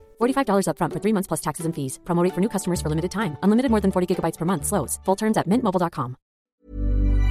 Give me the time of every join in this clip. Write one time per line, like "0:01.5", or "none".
0:06.4